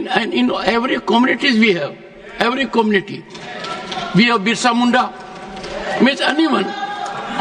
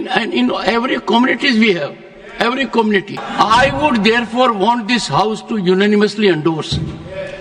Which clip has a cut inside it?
second; 1 cut; at 3.2 s

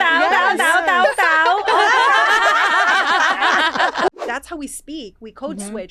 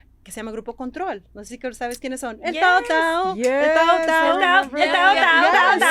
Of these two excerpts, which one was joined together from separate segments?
first; 1 cut; at 4.1 s

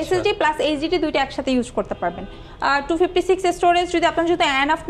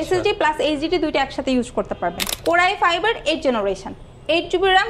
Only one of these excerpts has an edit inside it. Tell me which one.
second; 1 cut; at 2.3 s

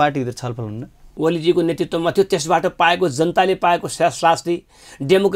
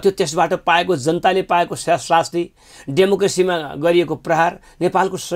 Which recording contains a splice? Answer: first; 1 cut; at 1.0 s

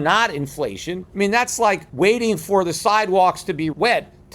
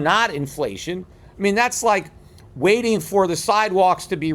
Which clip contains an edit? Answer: first; 2 cuts; at 1.0 s, 1.9 s

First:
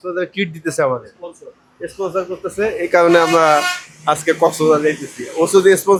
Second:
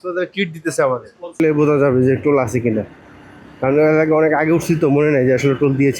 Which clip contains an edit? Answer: second; 1 cut; at 1.4 s

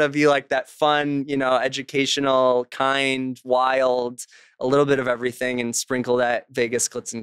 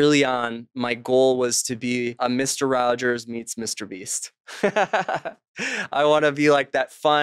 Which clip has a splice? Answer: second; 1 cut; at 2.2 s

